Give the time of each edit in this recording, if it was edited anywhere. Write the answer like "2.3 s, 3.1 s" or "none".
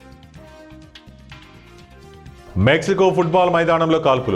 1.5 s